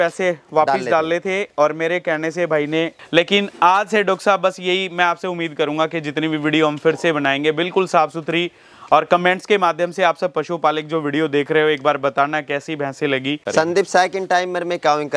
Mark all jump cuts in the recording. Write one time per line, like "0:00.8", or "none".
0:02.9
0:13.4